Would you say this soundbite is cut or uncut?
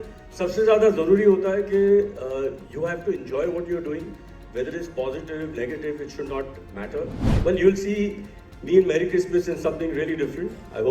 cut